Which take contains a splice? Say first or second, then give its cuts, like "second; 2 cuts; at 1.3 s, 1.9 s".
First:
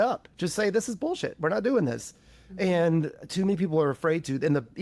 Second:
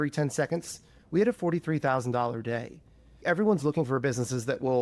second; 2 cuts; at 0.9 s, 3.2 s